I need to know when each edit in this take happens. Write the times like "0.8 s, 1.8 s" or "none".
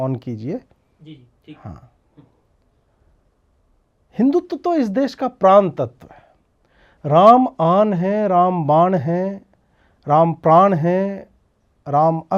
none